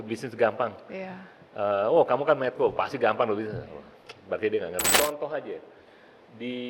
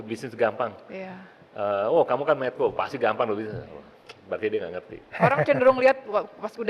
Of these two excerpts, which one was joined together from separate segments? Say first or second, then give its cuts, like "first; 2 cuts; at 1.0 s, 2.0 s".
first; 1 cut; at 4.9 s